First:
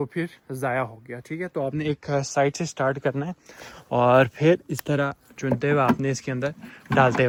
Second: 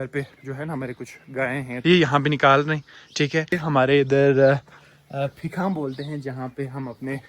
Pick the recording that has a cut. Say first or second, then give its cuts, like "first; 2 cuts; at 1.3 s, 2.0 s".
second; 2 cuts; at 1.8 s, 3.6 s